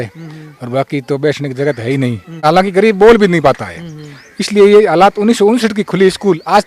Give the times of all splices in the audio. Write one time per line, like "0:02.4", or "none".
0:02.3